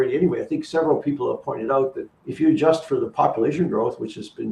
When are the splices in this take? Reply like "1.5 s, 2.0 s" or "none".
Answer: 2.0 s